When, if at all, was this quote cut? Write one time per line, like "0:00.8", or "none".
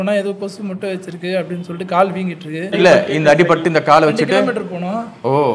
0:02.7